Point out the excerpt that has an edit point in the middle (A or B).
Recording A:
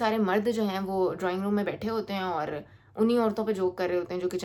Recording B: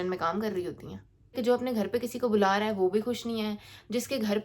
B